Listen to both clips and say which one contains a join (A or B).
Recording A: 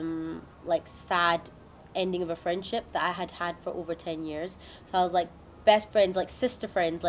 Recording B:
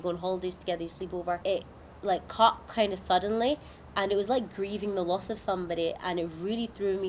B